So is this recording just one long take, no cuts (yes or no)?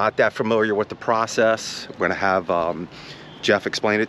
yes